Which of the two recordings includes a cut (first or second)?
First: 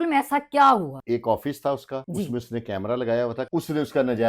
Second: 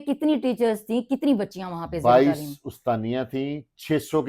first